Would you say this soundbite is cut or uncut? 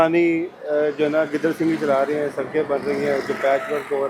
uncut